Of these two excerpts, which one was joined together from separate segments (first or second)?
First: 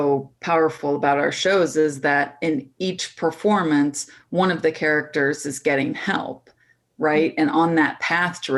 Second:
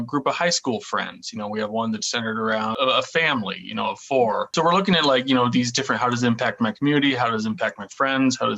second